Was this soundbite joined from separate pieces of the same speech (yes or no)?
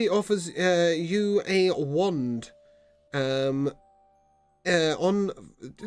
no